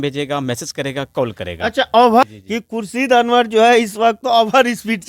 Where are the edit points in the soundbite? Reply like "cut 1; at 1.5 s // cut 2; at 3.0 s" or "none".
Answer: cut 1; at 2.2 s